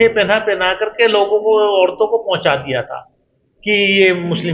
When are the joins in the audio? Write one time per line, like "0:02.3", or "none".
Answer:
none